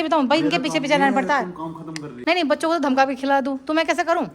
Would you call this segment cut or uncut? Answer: cut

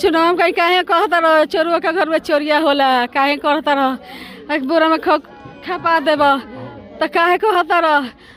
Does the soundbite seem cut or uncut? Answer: uncut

